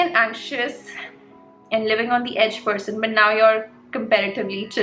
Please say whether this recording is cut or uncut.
uncut